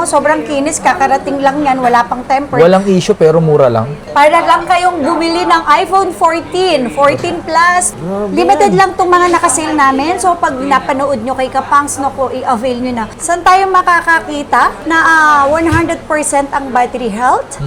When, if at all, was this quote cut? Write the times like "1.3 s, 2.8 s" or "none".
4.0 s, 7.9 s, 13.0 s